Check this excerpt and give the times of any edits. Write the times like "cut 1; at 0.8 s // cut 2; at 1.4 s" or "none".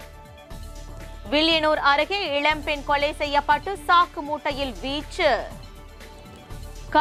none